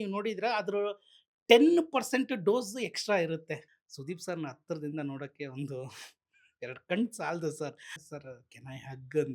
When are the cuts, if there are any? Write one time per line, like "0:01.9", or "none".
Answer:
0:03.6
0:07.9